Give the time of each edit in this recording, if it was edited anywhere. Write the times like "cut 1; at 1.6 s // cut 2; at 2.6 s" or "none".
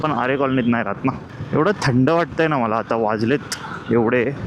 cut 1; at 1.3 s